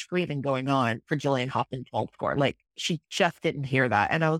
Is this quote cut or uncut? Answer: uncut